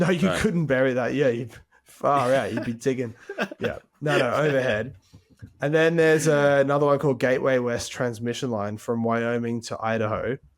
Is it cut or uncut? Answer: uncut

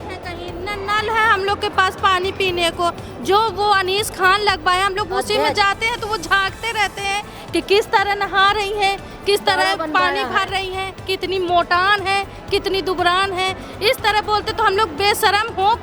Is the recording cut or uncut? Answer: uncut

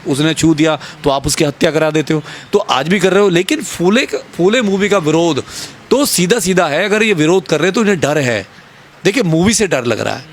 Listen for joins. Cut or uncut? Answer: uncut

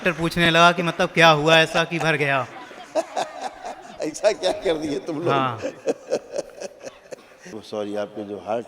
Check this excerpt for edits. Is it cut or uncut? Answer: cut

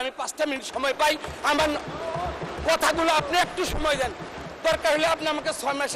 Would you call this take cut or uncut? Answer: uncut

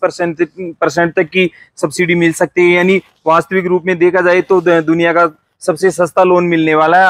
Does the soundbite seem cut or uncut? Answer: uncut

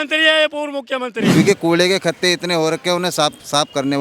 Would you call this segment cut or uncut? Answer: cut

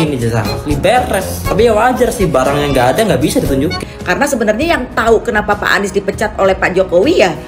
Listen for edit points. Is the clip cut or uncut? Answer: cut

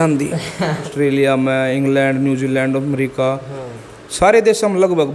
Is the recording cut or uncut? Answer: cut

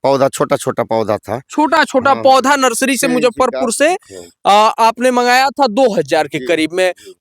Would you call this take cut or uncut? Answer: uncut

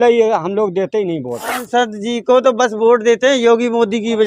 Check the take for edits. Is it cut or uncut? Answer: cut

